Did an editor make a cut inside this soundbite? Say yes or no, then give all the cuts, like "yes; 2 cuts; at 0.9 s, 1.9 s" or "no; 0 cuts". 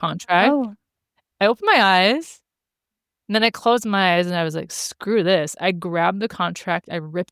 yes; 1 cut; at 1.3 s